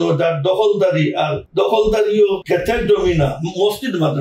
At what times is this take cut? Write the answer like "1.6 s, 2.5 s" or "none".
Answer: 1.4 s, 2.4 s